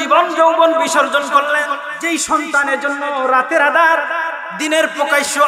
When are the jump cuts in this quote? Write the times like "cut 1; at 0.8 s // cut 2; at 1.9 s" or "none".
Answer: cut 1; at 1.9 s

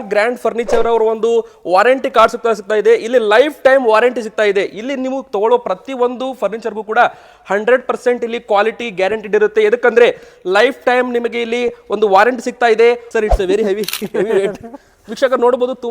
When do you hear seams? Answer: cut 1; at 13.0 s

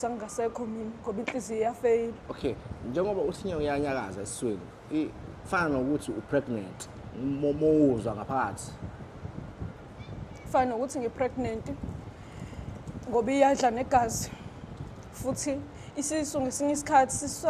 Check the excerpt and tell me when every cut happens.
cut 1; at 2.2 s

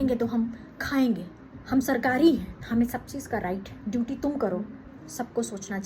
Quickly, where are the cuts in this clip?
cut 1; at 1.5 s // cut 2; at 2.6 s // cut 3; at 3.7 s // cut 4; at 4.9 s

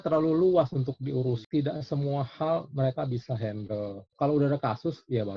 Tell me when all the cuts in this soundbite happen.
cut 1; at 1.4 s

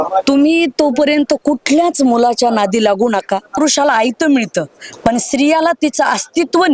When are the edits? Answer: cut 1; at 3.6 s

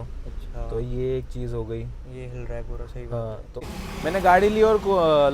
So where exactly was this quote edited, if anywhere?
cut 1; at 3.8 s

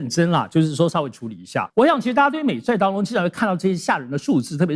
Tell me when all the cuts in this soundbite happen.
cut 1; at 1.6 s

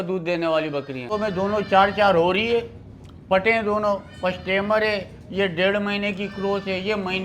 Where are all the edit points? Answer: cut 1; at 1.1 s

